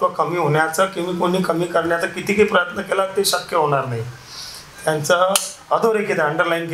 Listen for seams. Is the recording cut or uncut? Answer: uncut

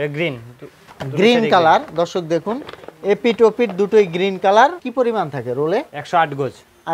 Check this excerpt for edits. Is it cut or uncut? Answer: cut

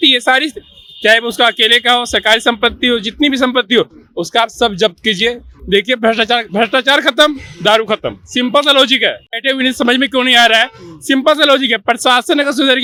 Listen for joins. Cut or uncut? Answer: uncut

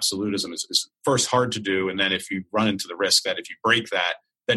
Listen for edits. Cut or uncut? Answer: uncut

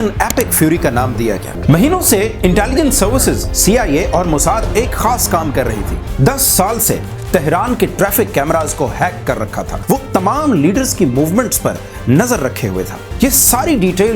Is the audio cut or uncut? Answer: cut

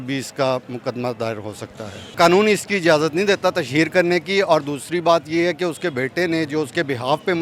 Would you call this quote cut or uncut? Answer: uncut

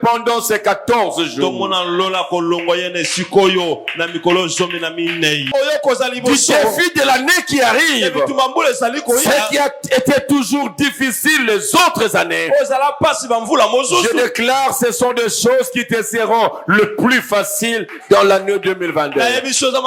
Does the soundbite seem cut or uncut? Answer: cut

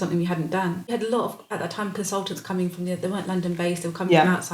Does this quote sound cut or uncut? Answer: cut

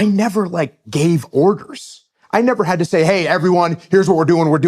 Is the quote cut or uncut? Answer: uncut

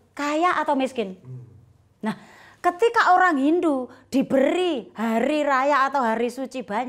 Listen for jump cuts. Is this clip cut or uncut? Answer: uncut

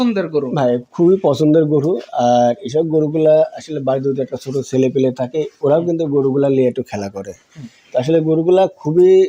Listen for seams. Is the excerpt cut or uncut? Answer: uncut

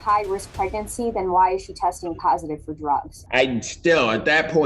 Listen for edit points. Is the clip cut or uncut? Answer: cut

